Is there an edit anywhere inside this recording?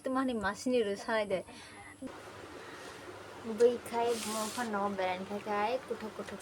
yes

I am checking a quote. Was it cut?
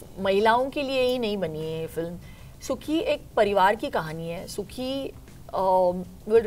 no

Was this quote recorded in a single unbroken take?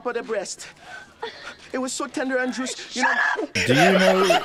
yes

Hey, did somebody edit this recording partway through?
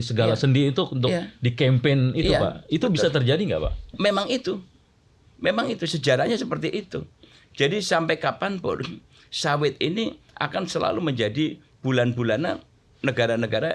no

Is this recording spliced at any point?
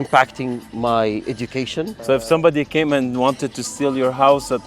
yes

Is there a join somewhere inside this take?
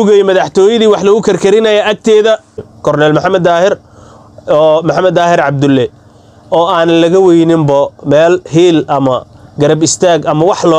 yes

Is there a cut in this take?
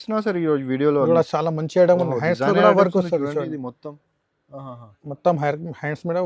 no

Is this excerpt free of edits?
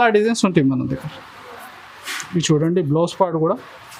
yes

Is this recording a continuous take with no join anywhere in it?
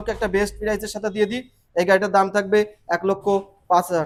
yes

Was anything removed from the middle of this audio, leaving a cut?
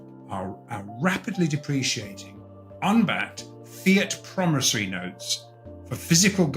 no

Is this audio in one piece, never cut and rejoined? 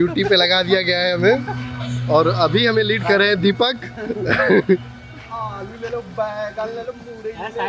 yes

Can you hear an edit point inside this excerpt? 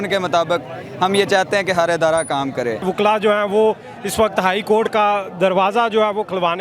yes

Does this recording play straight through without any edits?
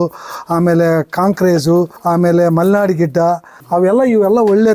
yes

